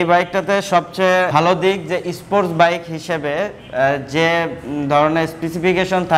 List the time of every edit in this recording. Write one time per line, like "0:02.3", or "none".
0:01.3